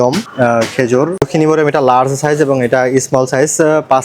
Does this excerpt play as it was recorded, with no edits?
no; 1 cut; at 1.3 s

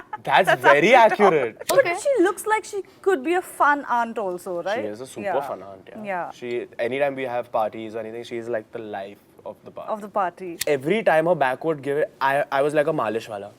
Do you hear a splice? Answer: yes; 2 cuts; at 1.7 s, 10.6 s

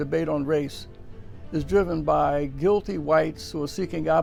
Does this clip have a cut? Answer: no; 0 cuts

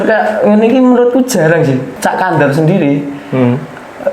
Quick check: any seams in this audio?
yes; 1 cut; at 1.9 s

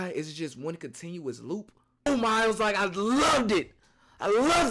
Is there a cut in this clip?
yes; 1 cut; at 2.1 s

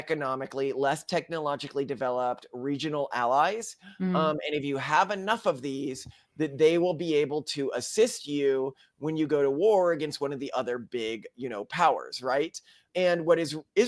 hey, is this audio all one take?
yes; 0 cuts

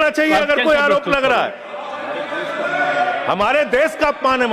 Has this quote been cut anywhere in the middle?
no; 0 cuts

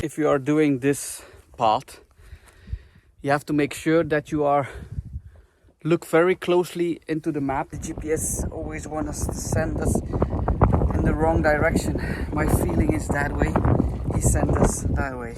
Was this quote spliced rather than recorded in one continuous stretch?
yes; 1 cut; at 7.8 s

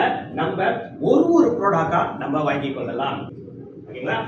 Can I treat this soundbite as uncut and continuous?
no; 1 cut; at 3.3 s

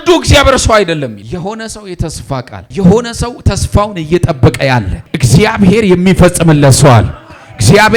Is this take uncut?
no; 1 cut; at 1.2 s

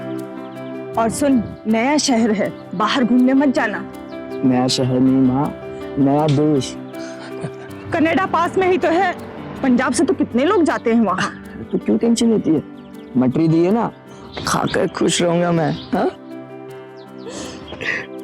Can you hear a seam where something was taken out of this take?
yes; 1 cut; at 0.9 s

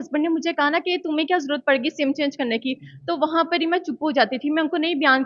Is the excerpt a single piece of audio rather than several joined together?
yes; 0 cuts

